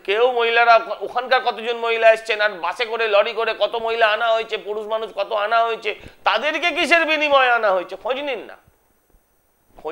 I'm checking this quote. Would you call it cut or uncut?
uncut